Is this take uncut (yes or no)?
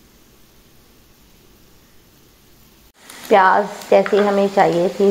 no